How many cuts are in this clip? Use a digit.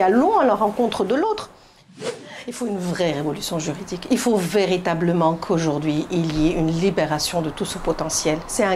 1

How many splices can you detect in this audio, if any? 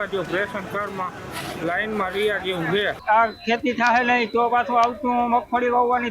1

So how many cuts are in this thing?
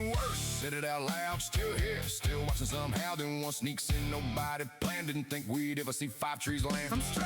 0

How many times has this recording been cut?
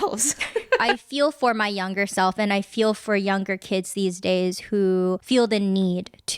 1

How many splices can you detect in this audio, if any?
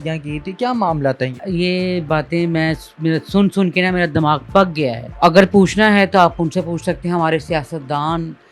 2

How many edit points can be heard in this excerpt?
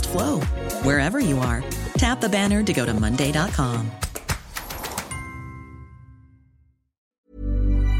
1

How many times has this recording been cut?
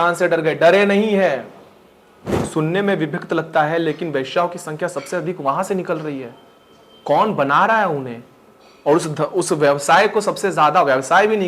1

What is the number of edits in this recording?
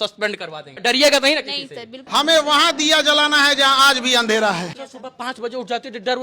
3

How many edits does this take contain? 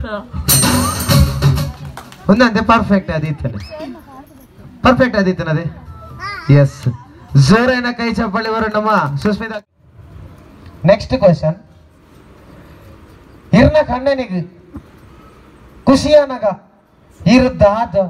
1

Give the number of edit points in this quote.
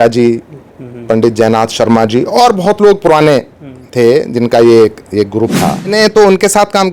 1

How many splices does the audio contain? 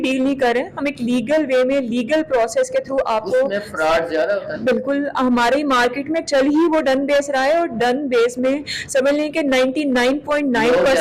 0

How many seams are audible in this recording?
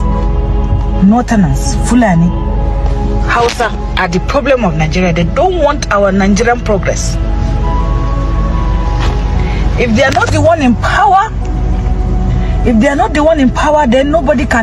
0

